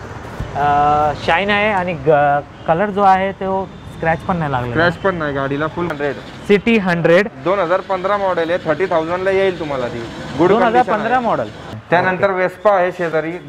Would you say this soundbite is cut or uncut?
cut